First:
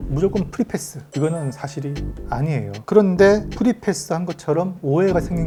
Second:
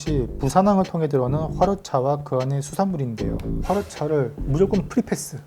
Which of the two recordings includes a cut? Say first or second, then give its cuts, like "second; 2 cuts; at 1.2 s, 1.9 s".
second; 1 cut; at 3.5 s